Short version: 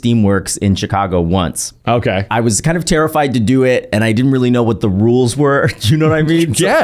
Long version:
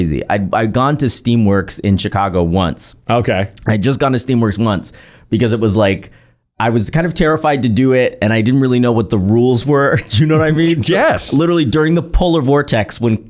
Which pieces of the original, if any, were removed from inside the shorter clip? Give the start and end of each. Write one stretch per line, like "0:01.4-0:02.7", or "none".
0:03.5-0:06.5